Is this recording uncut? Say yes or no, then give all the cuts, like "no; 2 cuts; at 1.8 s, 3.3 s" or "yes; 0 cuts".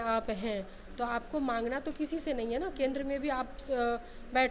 yes; 0 cuts